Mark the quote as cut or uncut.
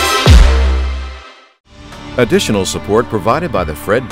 cut